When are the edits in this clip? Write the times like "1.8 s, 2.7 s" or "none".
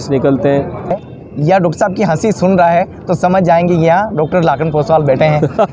1.0 s